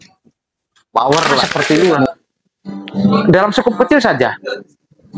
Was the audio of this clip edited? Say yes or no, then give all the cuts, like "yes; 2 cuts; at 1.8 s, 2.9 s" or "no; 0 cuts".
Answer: yes; 1 cut; at 1.5 s